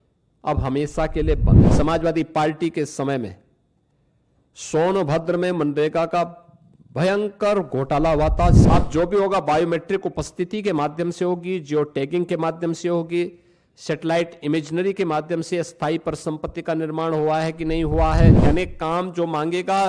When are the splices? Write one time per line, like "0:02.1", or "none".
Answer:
0:01.6
0:08.6
0:18.4